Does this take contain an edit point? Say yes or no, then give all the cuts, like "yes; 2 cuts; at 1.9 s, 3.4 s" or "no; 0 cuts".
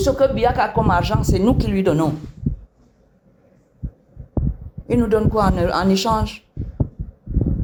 no; 0 cuts